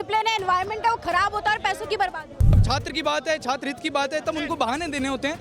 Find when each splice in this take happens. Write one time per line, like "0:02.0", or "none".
0:02.6